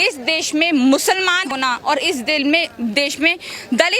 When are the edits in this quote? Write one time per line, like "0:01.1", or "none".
0:01.5